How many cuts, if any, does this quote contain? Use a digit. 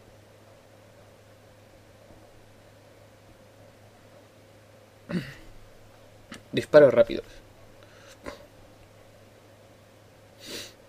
1